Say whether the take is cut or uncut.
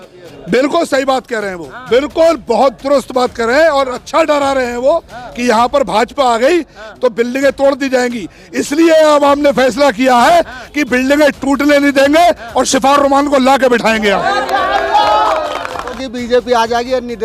cut